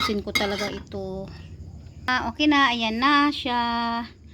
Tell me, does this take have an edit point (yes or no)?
yes